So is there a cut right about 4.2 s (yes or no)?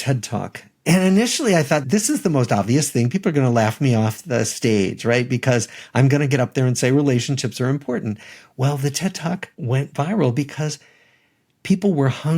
no